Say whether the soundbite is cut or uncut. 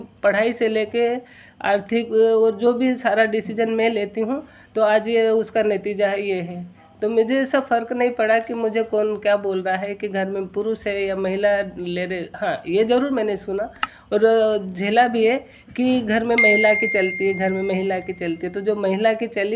uncut